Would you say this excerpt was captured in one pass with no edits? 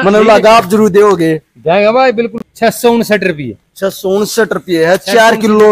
no; 1 cut; at 2.4 s

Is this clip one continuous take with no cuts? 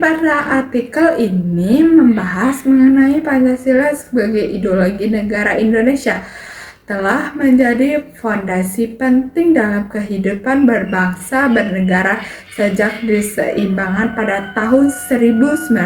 no; 1 cut; at 11.5 s

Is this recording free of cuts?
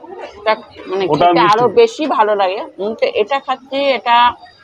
yes; 0 cuts

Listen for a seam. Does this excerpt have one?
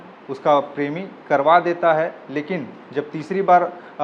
no; 0 cuts

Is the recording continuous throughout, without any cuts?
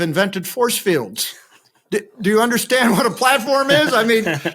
yes; 0 cuts

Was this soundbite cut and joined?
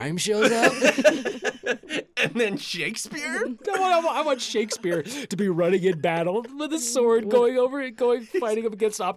no; 0 cuts

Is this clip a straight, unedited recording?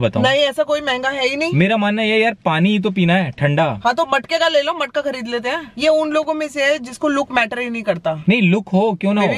no; 3 cuts; at 3.8 s, 5.6 s, 8.2 s

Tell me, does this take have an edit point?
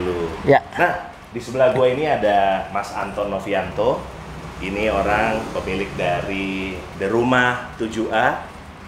no; 0 cuts

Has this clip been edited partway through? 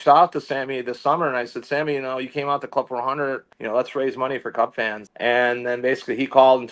yes; 2 cuts; at 3.5 s, 5.0 s

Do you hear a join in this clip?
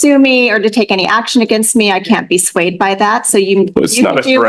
no; 0 cuts

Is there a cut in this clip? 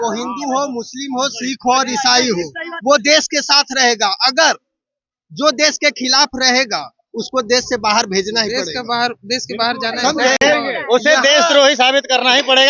no; 0 cuts

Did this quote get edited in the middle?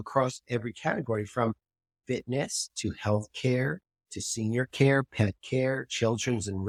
no; 0 cuts

